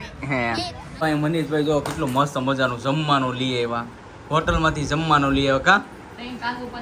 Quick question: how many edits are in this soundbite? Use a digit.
1